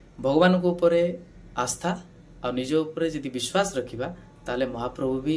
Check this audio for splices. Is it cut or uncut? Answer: uncut